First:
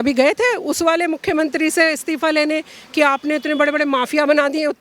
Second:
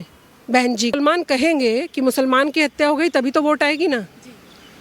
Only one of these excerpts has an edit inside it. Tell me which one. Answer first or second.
second